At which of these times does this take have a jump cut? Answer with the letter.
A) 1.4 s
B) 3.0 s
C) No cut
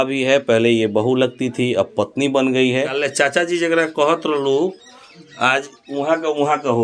B